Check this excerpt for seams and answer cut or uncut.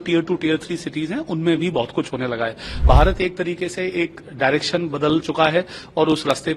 cut